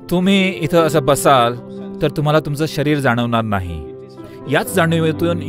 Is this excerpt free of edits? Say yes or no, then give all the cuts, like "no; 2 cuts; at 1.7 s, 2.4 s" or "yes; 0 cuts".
yes; 0 cuts